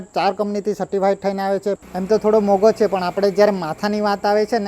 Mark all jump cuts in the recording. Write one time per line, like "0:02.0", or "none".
0:01.8

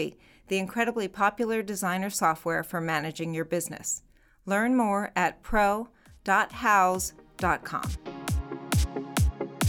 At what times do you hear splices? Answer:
0:07.8

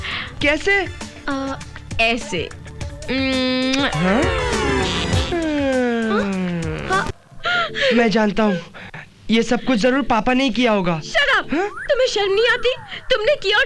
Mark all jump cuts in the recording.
0:07.1

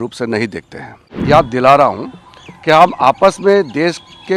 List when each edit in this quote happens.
0:01.1

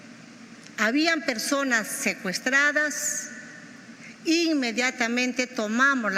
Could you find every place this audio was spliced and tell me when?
none

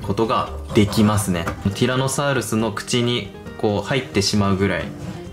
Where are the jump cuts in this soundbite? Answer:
0:01.7

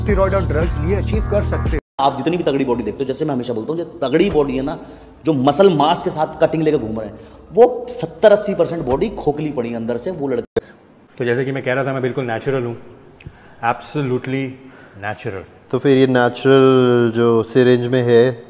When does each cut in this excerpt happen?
0:01.8
0:10.4

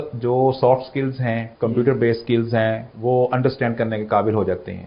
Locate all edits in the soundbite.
0:01.5
0:02.9

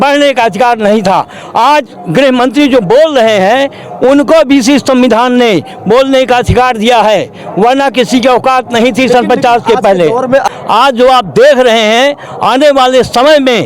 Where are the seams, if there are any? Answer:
0:10.5

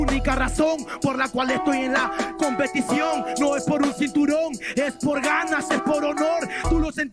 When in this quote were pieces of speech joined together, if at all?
0:05.9

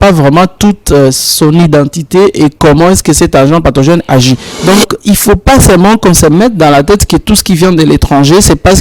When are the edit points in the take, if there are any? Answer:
0:04.5

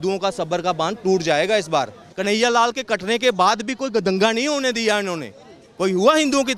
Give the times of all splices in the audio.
0:02.1

